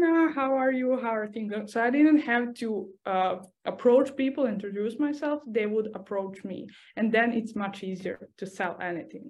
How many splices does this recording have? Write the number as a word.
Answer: one